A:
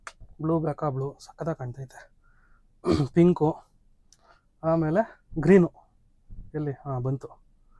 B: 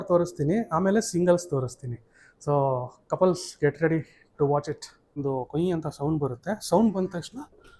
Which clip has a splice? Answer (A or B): B